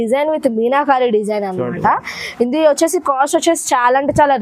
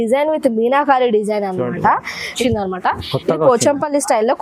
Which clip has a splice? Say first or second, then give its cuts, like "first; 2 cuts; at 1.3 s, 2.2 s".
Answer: second; 1 cut; at 2.4 s